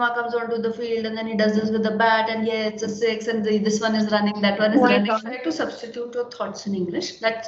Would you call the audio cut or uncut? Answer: cut